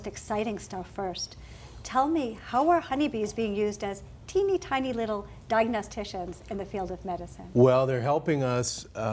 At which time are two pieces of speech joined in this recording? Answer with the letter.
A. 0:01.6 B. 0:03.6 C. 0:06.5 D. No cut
B